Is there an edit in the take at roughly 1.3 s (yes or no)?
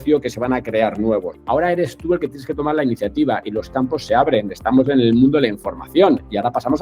yes